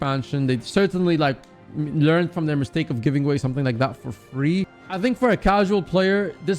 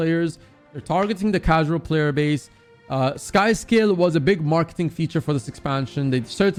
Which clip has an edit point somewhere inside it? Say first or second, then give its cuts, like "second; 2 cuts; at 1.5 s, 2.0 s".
first; 1 cut; at 4.8 s